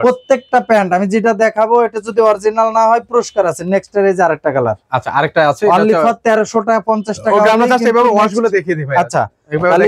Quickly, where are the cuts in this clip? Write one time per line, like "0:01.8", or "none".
none